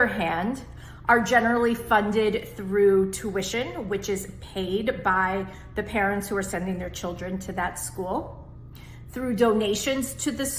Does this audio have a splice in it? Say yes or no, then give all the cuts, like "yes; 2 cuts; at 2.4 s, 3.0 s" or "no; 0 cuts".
no; 0 cuts